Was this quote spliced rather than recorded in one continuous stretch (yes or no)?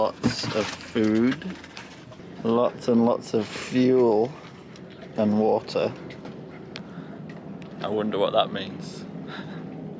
no